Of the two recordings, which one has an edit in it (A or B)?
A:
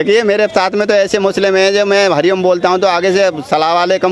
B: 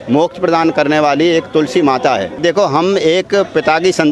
B